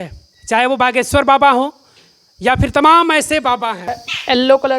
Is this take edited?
yes; 1 cut; at 3.9 s

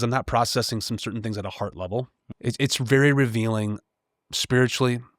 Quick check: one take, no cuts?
no; 1 cut; at 2.2 s

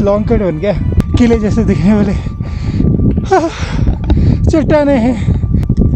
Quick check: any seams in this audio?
yes; 1 cut; at 0.9 s

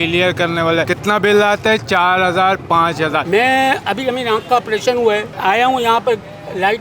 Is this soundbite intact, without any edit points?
no; 2 cuts; at 3.2 s, 5.3 s

